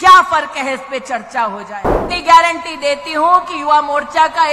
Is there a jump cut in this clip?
yes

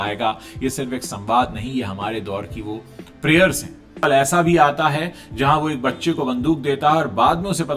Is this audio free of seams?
no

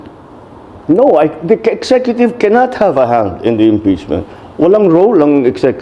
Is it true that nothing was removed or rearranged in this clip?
yes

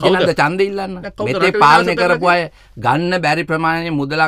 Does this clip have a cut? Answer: no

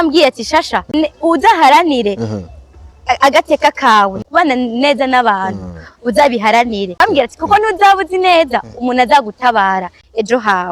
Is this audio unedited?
no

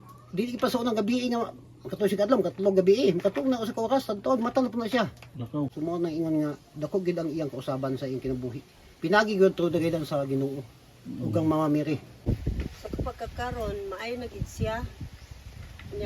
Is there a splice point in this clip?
yes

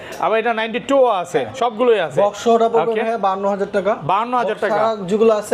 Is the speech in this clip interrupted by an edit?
no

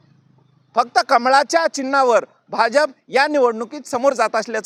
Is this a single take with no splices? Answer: yes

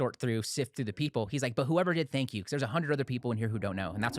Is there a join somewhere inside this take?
no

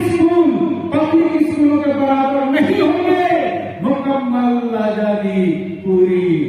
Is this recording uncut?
yes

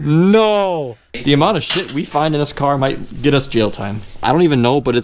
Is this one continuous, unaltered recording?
no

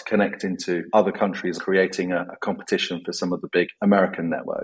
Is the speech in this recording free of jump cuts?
no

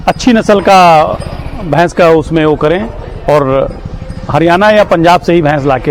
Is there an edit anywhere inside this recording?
no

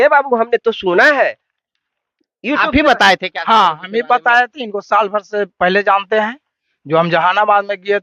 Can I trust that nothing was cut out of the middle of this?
yes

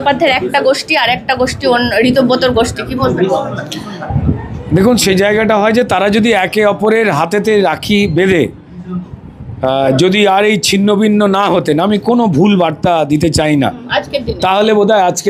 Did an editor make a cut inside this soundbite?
no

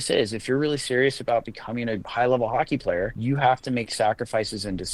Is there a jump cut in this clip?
yes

